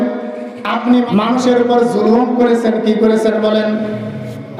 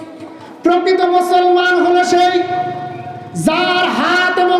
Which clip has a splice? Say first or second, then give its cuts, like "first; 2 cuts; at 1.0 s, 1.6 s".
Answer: first; 1 cut; at 1.1 s